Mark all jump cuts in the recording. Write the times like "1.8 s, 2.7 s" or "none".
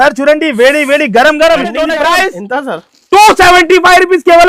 1.9 s